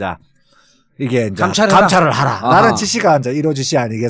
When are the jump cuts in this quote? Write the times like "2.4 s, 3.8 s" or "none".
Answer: none